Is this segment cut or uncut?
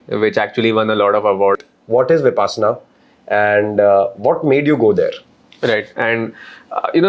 cut